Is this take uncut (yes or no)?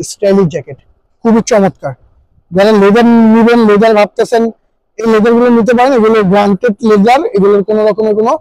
yes